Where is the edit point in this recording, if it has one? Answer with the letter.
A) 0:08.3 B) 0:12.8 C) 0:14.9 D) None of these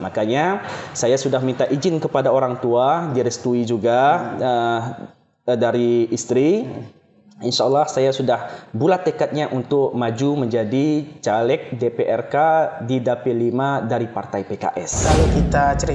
C